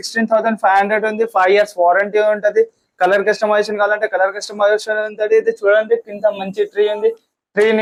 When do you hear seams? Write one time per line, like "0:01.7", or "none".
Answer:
none